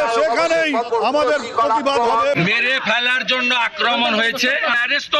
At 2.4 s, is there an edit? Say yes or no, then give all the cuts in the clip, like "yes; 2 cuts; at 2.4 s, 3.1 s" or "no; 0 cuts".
yes; 2 cuts; at 0.9 s, 2.4 s